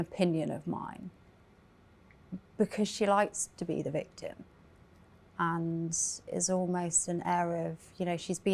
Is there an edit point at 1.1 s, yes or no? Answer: no